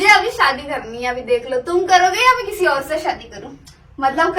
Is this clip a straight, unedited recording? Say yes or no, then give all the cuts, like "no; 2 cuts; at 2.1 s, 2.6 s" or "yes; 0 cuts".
no; 1 cut; at 3.2 s